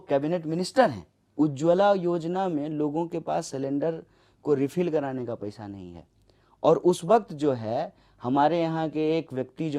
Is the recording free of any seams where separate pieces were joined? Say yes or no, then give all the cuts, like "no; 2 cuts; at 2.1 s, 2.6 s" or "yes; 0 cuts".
no; 1 cut; at 1.2 s